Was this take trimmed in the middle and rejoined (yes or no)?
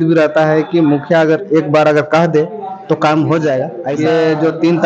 yes